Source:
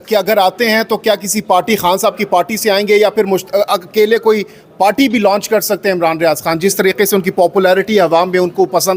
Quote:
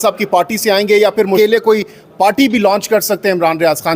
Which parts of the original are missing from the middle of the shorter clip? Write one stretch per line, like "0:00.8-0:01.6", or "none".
0:03.9-0:04.5

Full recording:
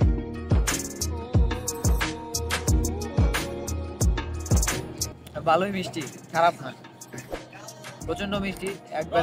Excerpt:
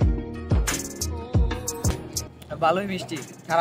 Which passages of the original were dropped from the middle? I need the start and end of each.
0:01.9-0:04.8

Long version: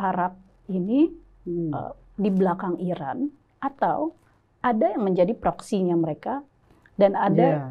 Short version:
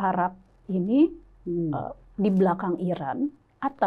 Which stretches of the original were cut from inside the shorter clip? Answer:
none

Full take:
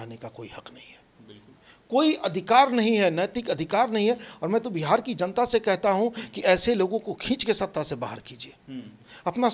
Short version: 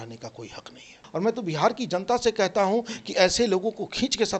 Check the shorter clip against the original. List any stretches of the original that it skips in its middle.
0:01.0-0:04.3

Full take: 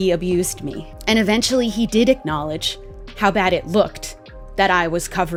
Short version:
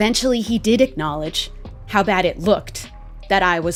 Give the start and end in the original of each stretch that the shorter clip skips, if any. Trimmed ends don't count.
none

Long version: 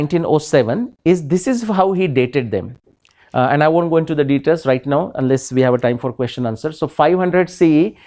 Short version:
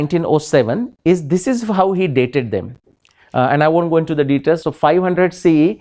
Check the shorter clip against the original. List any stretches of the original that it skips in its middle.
0:04.6-0:06.8

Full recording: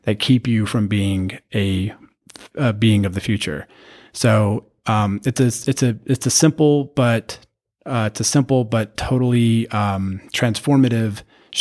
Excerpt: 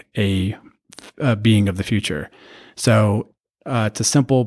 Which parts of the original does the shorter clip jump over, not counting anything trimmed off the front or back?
0:04.7-0:07.5

